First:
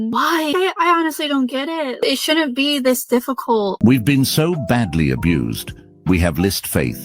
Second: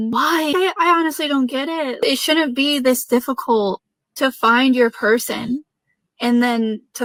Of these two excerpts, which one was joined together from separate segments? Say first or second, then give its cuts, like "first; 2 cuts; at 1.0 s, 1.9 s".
first; 1 cut; at 3.7 s